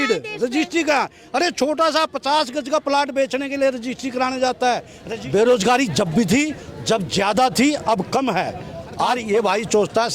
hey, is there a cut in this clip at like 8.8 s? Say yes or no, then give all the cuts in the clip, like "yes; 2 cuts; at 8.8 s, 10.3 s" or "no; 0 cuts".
yes; 2 cuts; at 4.9 s, 8.8 s